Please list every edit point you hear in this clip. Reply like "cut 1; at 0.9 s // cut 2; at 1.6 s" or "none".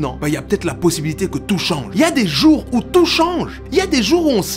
cut 1; at 1.9 s // cut 2; at 3.5 s